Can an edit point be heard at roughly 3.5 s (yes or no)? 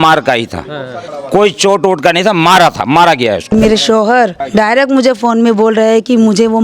yes